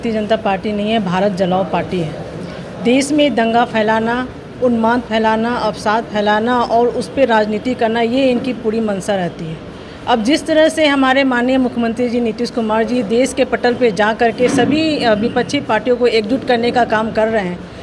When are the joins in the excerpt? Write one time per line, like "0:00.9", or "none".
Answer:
none